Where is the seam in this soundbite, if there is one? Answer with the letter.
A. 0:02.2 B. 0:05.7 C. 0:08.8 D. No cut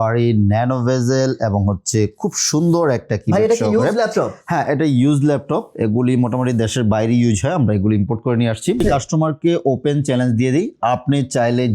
C